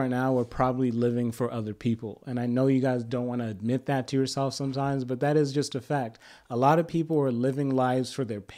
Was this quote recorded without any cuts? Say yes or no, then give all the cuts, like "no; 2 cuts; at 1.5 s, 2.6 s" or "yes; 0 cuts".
yes; 0 cuts